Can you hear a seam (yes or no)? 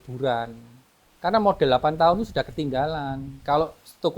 no